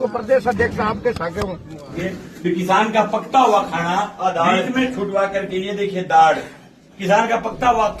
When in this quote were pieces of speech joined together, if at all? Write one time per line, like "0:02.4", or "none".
0:01.9